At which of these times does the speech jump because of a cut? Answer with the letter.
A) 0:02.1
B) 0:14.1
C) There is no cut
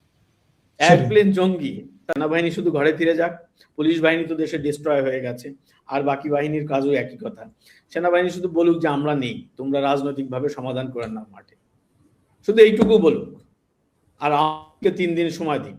A